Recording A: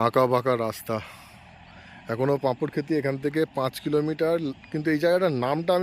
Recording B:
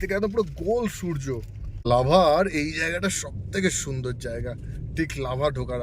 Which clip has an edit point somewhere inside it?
B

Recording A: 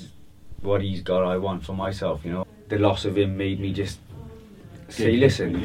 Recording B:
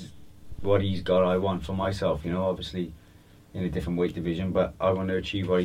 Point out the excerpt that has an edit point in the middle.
A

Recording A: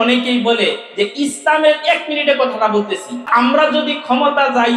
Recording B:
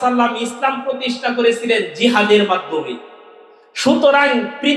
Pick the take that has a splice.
A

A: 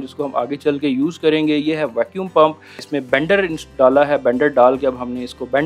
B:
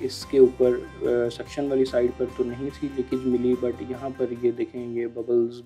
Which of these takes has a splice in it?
A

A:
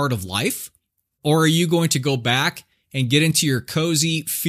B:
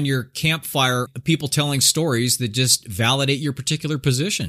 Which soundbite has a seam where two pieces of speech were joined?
B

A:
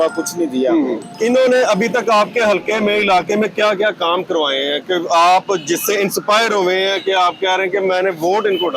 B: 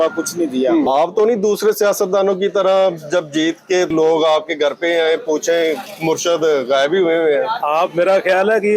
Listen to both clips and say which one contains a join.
B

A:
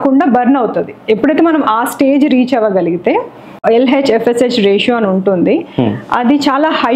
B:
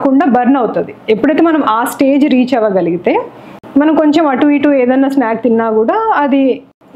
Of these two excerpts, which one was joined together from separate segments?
A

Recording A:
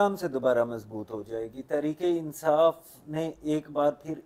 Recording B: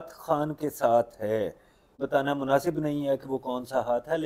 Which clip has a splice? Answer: B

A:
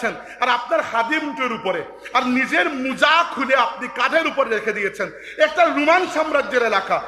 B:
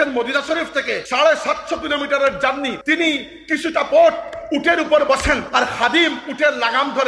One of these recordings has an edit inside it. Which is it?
B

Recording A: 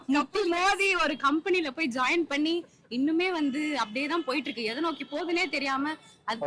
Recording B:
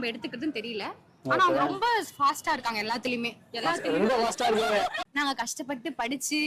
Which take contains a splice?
B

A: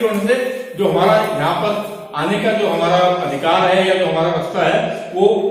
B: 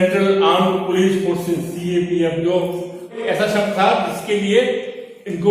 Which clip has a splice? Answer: B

